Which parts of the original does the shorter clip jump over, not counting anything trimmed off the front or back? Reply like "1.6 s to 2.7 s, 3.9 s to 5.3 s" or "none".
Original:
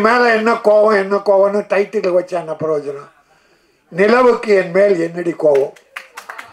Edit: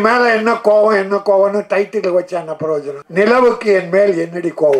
3.0 s to 3.8 s